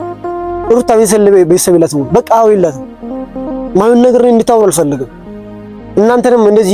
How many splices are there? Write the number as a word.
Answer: zero